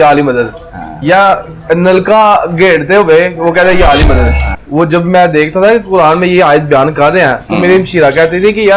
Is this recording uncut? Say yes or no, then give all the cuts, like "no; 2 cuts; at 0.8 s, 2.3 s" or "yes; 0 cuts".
no; 1 cut; at 4.4 s